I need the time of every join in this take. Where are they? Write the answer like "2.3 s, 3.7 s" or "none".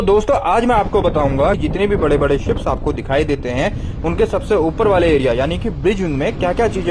1.6 s